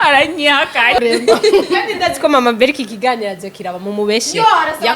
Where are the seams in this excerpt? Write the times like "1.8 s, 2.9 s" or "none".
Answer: 1.0 s